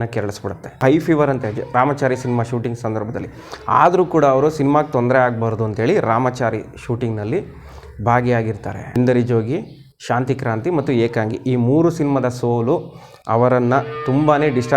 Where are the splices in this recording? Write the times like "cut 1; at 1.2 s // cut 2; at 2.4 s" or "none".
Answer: cut 1; at 0.8 s // cut 2; at 8.9 s